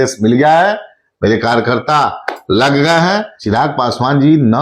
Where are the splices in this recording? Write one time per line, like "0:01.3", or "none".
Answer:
0:03.3